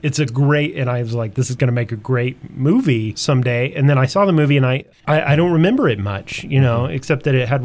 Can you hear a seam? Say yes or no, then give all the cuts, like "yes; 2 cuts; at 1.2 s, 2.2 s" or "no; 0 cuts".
yes; 2 cuts; at 3.1 s, 4.9 s